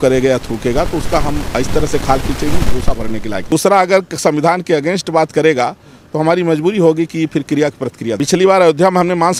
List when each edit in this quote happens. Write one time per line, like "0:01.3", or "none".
0:03.5
0:08.2